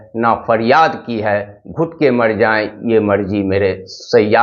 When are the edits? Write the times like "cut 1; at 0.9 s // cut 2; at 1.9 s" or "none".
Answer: none

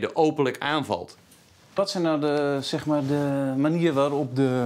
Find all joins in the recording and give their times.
cut 1; at 1.0 s

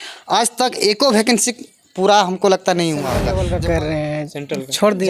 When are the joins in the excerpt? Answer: cut 1; at 3.3 s

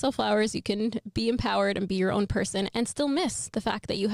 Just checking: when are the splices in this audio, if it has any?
none

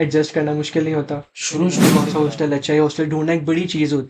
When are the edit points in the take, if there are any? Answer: cut 1; at 1.9 s

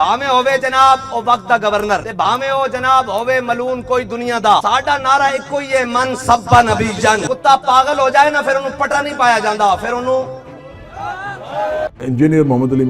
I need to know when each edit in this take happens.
cut 1; at 2.1 s // cut 2; at 4.6 s // cut 3; at 7.2 s // cut 4; at 11.9 s

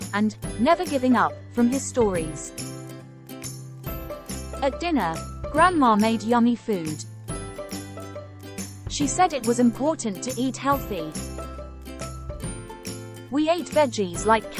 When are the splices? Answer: cut 1; at 7.0 s // cut 2; at 8.7 s // cut 3; at 11.1 s // cut 4; at 12.7 s

